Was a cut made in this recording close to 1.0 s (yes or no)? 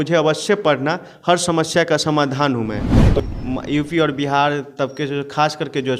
no